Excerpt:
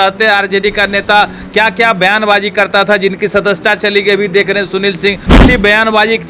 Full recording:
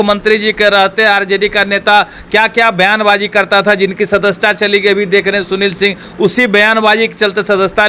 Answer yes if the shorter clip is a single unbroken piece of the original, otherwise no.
no